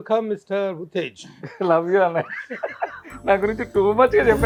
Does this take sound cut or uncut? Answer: uncut